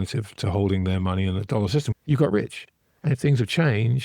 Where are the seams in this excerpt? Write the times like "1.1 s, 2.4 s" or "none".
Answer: 1.9 s